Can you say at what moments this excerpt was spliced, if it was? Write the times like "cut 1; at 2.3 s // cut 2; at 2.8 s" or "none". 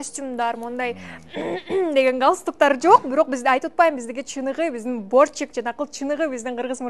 none